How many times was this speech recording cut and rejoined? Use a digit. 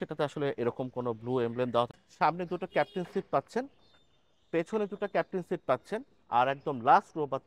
1